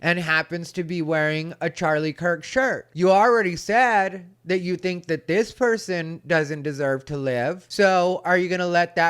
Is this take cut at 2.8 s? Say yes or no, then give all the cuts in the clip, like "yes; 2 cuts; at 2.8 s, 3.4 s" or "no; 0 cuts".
yes; 2 cuts; at 2.8 s, 7.6 s